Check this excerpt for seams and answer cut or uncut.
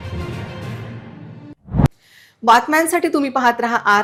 uncut